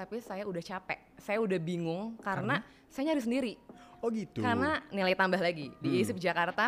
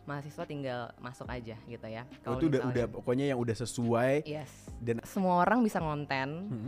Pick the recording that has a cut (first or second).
second